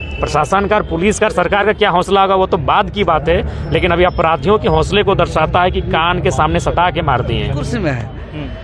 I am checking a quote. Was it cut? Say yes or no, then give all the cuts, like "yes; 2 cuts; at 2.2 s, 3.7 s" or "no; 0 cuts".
yes; 1 cut; at 7.6 s